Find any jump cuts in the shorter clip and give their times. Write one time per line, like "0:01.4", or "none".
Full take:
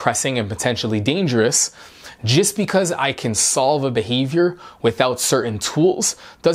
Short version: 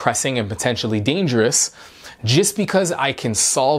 none